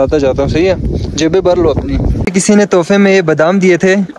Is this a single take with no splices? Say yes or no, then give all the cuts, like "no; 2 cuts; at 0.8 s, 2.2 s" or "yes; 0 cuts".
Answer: no; 1 cut; at 2.3 s